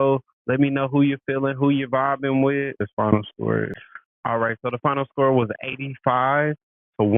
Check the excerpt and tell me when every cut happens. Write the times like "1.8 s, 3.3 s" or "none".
none